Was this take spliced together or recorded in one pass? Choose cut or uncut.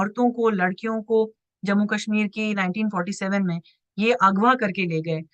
uncut